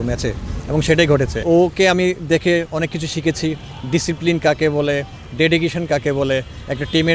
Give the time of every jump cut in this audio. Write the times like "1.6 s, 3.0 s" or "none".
1.4 s